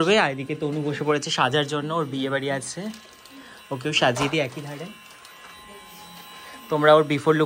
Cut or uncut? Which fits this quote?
uncut